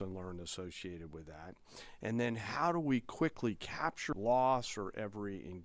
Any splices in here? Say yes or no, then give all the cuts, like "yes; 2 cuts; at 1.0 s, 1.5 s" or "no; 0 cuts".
yes; 1 cut; at 4.1 s